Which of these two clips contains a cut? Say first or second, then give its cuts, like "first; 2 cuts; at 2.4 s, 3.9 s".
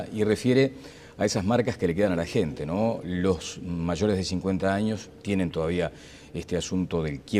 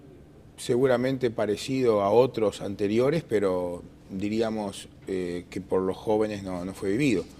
first; 1 cut; at 3.5 s